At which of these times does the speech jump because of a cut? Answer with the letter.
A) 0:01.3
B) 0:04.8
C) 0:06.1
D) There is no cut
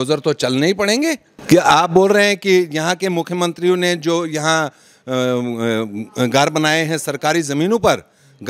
A